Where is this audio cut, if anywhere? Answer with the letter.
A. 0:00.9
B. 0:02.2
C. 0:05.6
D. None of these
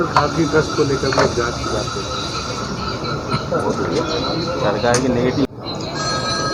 C